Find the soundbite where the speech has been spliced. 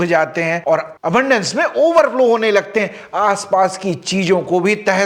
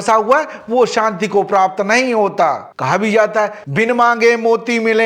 second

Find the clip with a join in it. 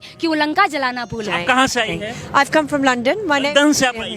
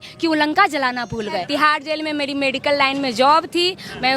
second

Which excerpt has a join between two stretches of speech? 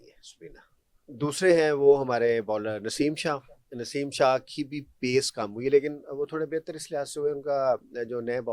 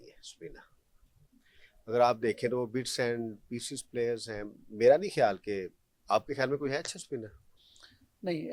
first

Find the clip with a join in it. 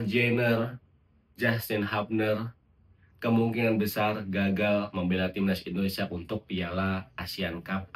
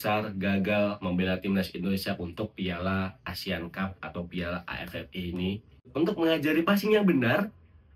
second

